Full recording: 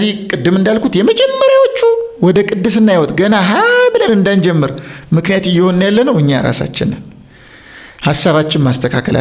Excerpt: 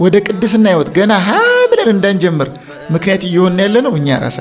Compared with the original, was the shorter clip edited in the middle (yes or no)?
no